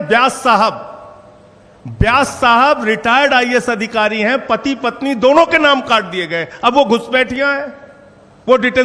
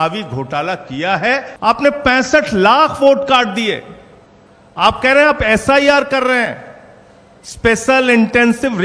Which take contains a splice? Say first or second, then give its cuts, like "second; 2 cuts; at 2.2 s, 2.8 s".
second; 1 cut; at 1.5 s